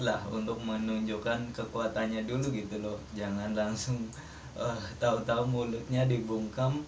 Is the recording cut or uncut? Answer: uncut